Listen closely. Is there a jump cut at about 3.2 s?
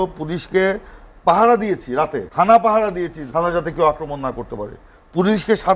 yes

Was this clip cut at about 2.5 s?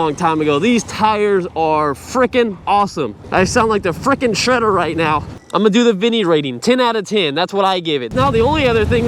no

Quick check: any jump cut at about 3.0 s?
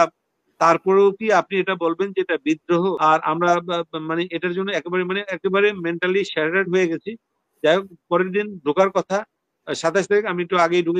yes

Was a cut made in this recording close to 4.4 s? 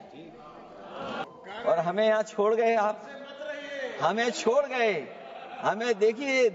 no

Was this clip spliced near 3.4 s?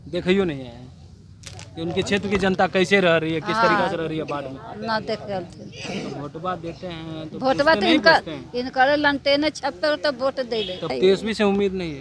no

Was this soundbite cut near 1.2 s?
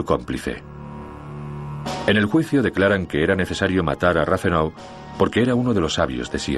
yes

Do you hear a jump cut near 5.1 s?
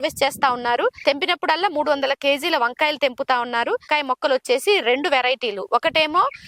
no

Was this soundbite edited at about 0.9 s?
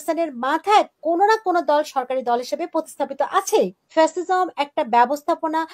no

